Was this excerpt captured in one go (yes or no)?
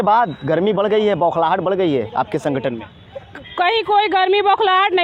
yes